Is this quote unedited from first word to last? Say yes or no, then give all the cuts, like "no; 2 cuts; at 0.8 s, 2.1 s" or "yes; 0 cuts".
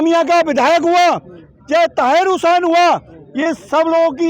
yes; 0 cuts